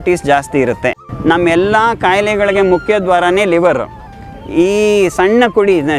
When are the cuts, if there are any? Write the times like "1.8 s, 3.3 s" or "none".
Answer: 1.1 s